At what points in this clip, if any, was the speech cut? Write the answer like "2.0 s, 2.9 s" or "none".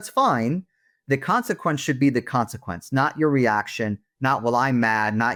none